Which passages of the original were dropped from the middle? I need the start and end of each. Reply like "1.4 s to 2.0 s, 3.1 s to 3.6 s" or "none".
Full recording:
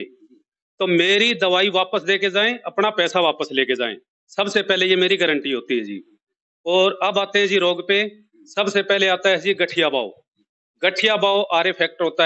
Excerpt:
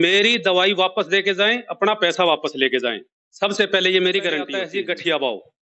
5.6 s to 9.3 s